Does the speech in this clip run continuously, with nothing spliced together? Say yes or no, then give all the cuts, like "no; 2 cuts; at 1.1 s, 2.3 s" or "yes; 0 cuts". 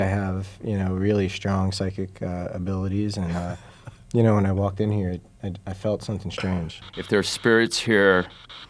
no; 1 cut; at 6.8 s